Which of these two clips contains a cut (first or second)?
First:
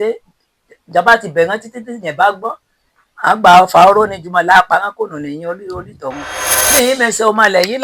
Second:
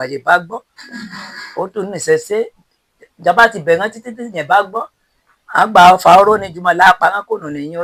first